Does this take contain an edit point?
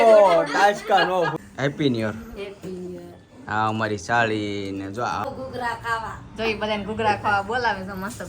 yes; 2 cuts; at 1.4 s, 5.2 s

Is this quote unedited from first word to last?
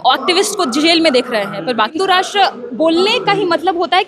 no; 1 cut; at 2.0 s

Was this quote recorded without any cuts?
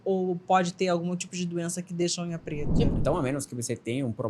no; 1 cut; at 2.9 s

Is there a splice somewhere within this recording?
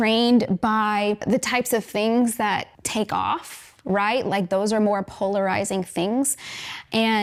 no; 0 cuts

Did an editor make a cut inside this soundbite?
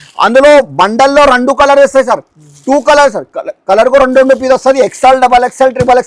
no; 0 cuts

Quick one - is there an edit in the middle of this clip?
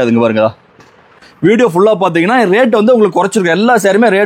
yes; 1 cut; at 1.3 s

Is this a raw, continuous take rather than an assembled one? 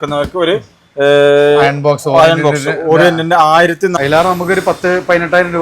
no; 1 cut; at 3.9 s

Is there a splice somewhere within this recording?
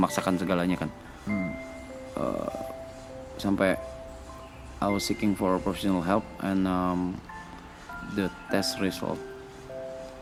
no; 0 cuts

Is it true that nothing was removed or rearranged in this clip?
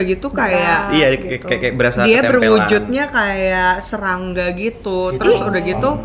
yes; 0 cuts

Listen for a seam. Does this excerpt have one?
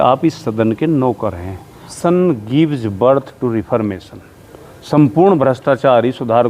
yes; 1 cut; at 1.9 s

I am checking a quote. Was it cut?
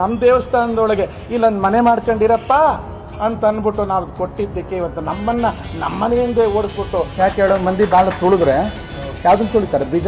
yes; 1 cut; at 7.1 s

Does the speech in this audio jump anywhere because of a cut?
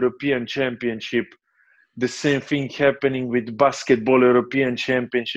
no; 0 cuts

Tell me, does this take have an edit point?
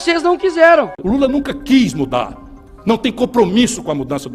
yes; 1 cut; at 1.0 s

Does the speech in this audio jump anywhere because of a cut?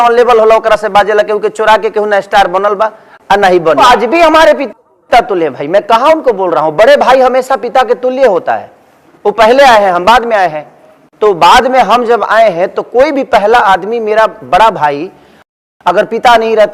yes; 1 cut; at 3.8 s

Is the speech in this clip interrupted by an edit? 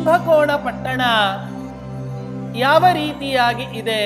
no; 0 cuts

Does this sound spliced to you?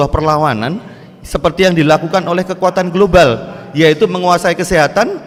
no; 0 cuts

